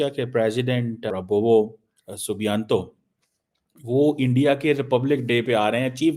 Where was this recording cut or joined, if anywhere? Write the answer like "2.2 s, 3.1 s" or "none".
1.1 s